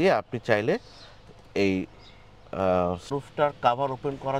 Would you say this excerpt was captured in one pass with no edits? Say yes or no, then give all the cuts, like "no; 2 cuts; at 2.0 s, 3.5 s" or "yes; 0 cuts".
no; 1 cut; at 3.1 s